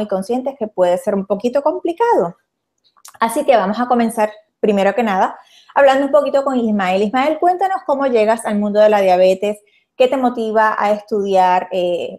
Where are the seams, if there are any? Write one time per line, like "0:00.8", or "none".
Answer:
0:05.1